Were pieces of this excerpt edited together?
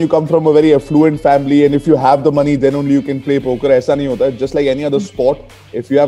no; 0 cuts

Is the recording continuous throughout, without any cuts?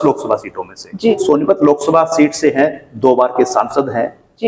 no; 1 cut; at 1.2 s

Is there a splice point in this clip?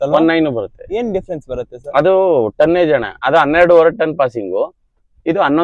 no; 0 cuts

